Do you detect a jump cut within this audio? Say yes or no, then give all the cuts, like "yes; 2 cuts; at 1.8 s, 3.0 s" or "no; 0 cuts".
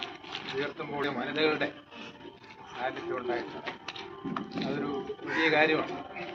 no; 0 cuts